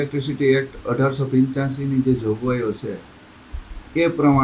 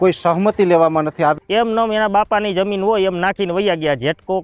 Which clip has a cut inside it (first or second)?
second